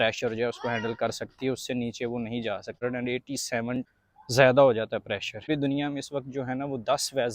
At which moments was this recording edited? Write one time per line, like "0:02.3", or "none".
0:02.8
0:05.5